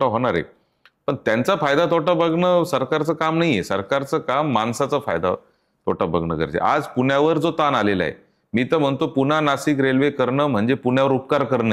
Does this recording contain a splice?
no; 0 cuts

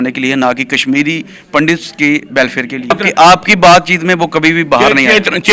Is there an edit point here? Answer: yes; 1 cut; at 2.9 s

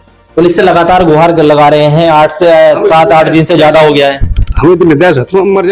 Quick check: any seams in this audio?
no; 0 cuts

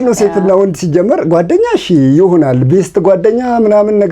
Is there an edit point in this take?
no; 0 cuts

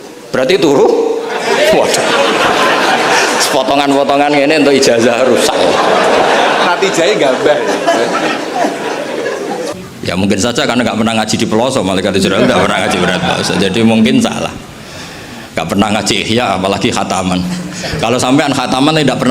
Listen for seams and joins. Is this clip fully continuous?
no; 1 cut; at 9.7 s

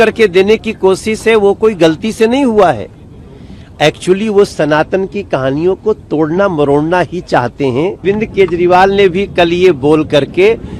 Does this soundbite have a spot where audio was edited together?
yes; 1 cut; at 8.0 s

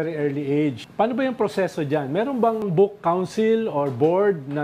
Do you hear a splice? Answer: yes; 2 cuts; at 0.8 s, 2.6 s

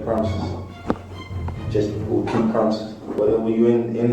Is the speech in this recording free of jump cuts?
yes; 0 cuts

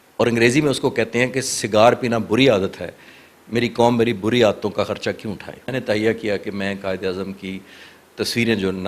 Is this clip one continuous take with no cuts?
no; 1 cut; at 5.6 s

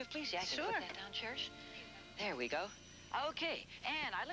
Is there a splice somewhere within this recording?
no; 0 cuts

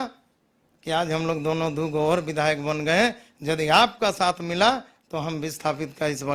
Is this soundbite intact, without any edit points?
yes; 0 cuts

